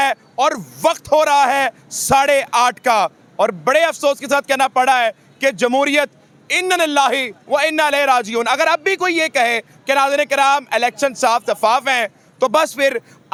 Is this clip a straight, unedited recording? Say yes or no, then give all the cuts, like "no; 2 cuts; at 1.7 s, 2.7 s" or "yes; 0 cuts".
yes; 0 cuts